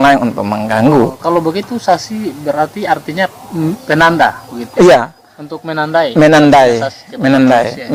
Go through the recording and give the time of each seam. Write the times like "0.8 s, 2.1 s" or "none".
none